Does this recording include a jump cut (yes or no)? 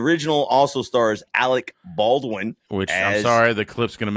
yes